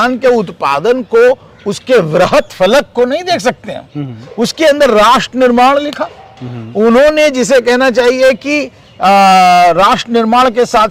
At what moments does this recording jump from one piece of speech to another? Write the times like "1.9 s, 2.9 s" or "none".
none